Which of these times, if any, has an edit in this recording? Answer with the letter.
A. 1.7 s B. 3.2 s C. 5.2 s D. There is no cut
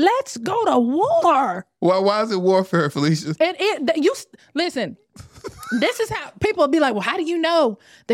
A